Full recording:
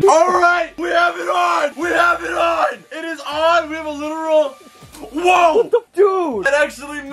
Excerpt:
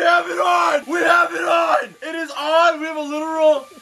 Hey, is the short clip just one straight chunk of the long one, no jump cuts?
yes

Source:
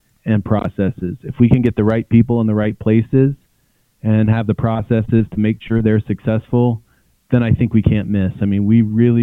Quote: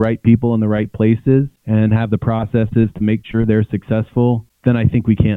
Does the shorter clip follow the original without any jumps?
no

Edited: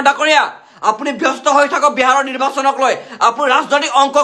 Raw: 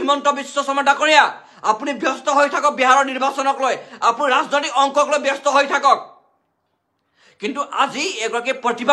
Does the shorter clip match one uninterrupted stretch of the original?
yes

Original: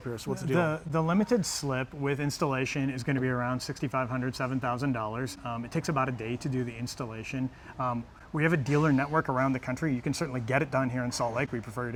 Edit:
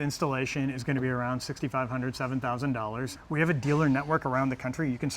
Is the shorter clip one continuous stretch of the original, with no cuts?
no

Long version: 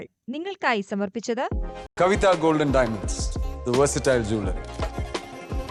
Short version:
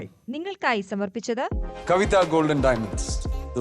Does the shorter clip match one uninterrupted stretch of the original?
no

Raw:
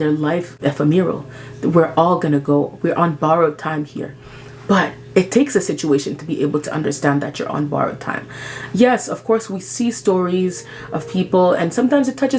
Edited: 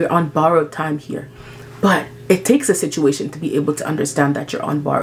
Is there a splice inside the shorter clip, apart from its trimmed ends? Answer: no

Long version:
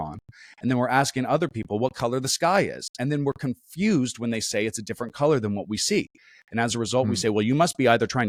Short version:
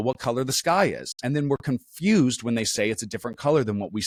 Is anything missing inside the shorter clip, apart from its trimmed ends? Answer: no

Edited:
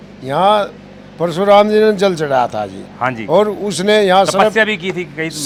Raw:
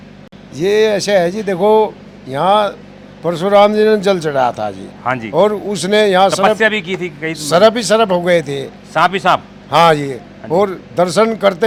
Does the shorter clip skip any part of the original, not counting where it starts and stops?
no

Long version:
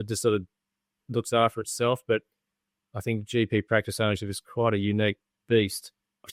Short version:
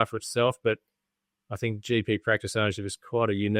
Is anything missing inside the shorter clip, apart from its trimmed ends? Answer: no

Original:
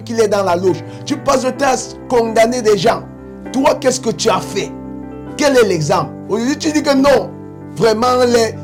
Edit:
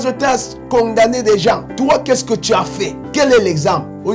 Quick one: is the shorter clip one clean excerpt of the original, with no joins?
no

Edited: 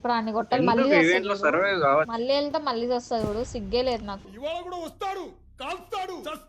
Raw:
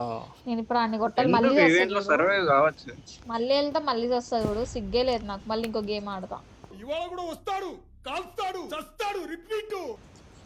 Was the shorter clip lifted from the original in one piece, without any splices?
no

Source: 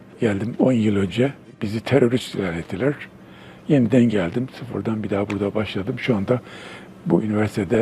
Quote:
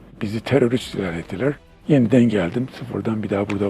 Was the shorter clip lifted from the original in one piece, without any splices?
no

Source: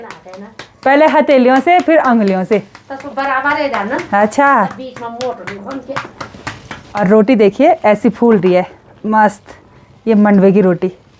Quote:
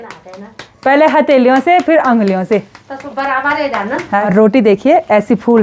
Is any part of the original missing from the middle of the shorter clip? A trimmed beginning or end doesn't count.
yes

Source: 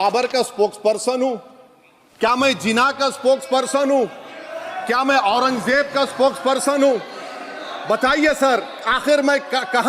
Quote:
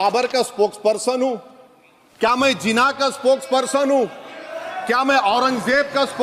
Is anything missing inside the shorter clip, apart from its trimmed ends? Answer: no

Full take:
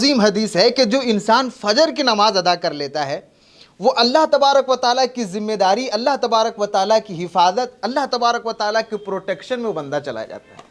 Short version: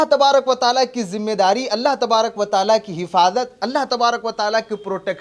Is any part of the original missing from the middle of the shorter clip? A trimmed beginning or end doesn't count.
no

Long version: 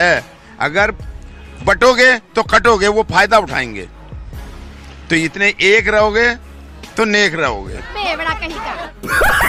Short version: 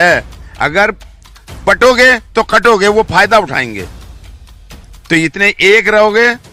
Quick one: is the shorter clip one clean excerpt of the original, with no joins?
yes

